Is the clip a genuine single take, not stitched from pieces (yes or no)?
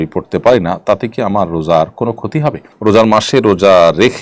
no